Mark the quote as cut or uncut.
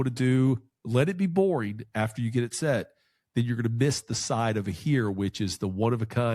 uncut